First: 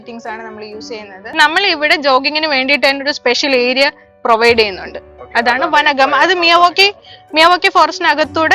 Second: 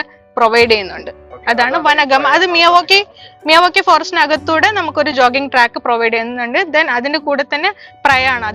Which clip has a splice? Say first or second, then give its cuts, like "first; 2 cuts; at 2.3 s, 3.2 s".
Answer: first; 1 cut; at 1.3 s